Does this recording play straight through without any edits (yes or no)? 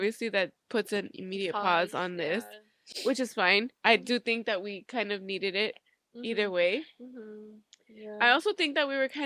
yes